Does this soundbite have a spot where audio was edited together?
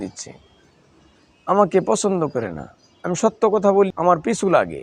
yes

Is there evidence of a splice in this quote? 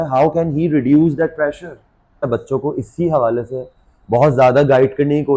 yes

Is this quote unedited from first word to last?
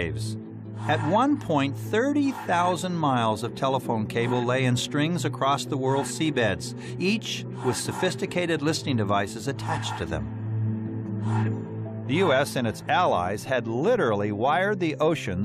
no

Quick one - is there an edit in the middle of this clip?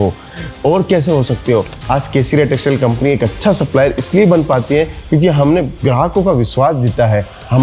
yes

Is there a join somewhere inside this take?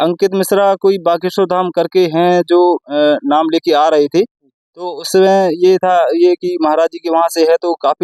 no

